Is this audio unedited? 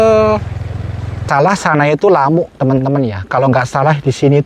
no; 1 cut; at 1.2 s

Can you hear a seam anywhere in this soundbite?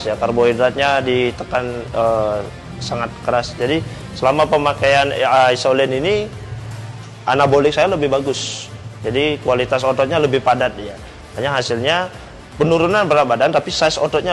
no; 0 cuts

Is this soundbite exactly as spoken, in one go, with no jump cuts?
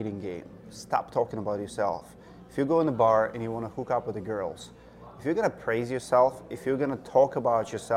yes; 0 cuts

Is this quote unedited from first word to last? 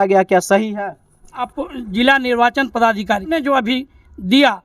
no; 2 cuts; at 1.5 s, 3.4 s

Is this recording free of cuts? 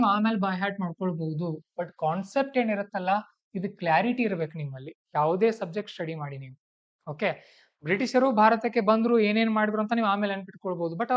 yes; 0 cuts

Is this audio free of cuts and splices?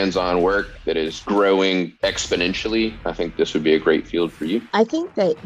no; 3 cuts; at 1.2 s, 1.9 s, 4.6 s

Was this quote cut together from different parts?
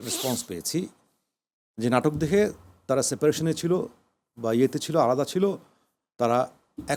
no; 0 cuts

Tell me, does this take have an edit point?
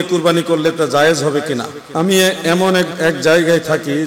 yes; 2 cuts; at 1.8 s, 2.9 s

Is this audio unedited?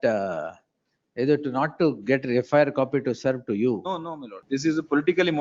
no; 1 cut; at 4.4 s

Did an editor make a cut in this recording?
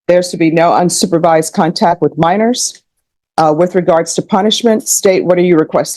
no; 0 cuts

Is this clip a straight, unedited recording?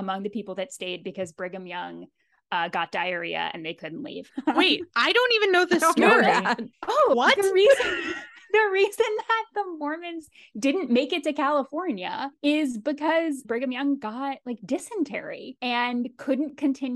no; 3 cuts; at 4.3 s, 7.1 s, 13.4 s

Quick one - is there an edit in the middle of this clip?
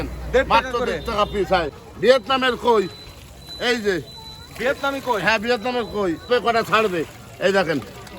yes; 2 cuts; at 1.8 s, 6.3 s

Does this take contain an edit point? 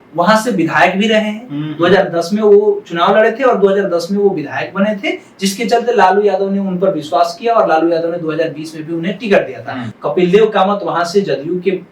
yes; 1 cut; at 9.8 s

